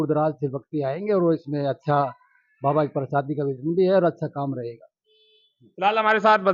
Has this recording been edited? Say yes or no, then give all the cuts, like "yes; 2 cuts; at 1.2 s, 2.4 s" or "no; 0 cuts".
no; 0 cuts